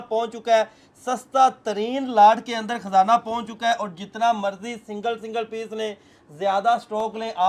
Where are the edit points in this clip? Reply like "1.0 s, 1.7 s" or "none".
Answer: none